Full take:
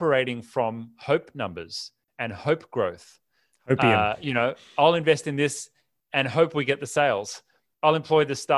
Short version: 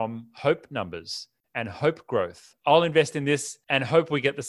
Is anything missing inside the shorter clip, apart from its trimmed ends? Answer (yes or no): yes